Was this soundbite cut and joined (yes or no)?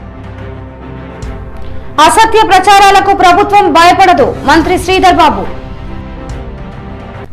no